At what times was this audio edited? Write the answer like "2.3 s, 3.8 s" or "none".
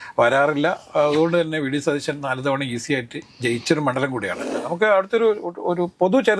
4.5 s